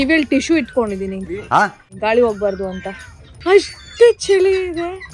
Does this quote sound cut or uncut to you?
cut